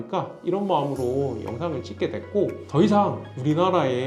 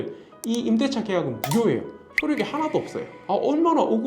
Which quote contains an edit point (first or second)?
second